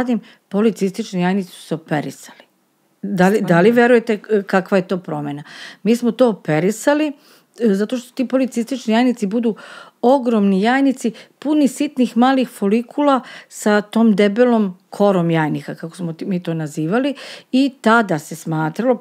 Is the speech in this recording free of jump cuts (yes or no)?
yes